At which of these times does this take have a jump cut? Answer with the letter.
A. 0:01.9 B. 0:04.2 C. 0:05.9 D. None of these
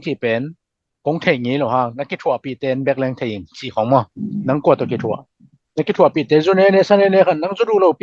B